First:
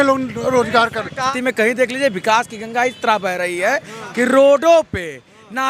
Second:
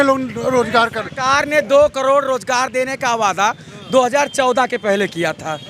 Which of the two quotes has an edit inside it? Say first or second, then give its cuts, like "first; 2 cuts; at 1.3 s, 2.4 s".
first; 1 cut; at 1.3 s